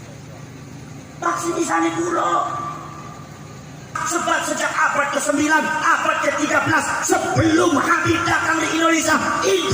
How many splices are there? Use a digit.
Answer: 1